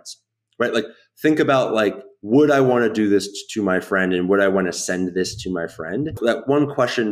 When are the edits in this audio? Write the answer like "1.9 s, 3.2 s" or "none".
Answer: 6.1 s